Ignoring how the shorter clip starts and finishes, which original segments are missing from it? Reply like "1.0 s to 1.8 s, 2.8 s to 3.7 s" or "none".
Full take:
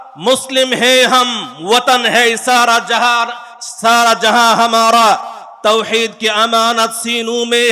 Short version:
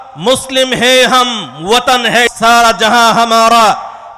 2.3 s to 3.7 s